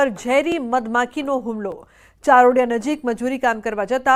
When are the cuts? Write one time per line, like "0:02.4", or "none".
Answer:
none